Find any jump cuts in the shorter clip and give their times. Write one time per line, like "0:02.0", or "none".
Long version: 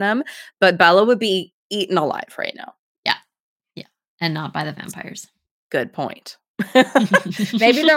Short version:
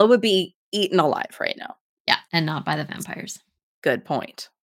0:02.2